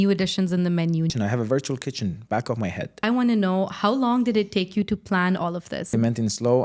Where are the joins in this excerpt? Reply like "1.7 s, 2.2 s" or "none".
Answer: 1.1 s, 3.0 s, 5.9 s